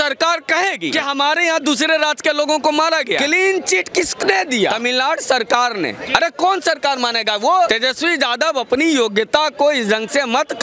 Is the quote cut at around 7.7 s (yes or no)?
yes